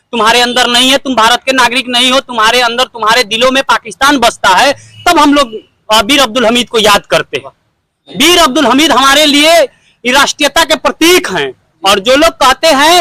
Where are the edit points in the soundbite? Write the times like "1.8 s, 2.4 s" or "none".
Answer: none